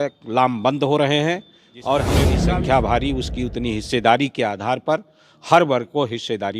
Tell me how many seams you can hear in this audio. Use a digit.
1